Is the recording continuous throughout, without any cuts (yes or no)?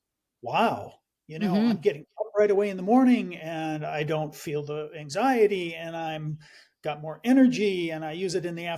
yes